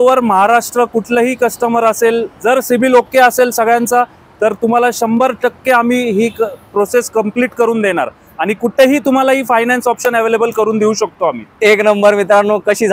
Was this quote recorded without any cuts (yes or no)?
yes